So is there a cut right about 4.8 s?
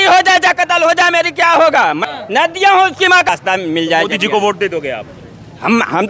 no; 2 cuts; at 2.0 s, 3.3 s

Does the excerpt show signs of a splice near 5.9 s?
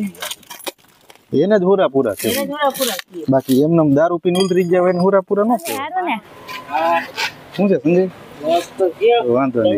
yes; 1 cut; at 5.9 s

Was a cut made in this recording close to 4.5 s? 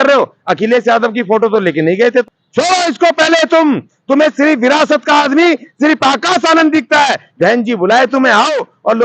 no; 2 cuts; at 2.3 s, 7.2 s

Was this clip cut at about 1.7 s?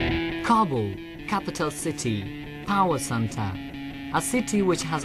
no; 0 cuts

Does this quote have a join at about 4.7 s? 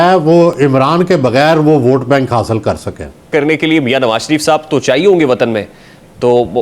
no; 1 cut; at 3.3 s

